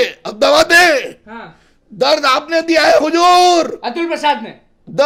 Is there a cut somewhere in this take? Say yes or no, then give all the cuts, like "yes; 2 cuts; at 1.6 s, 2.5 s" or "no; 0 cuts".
no; 0 cuts